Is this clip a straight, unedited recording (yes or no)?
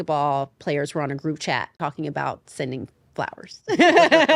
no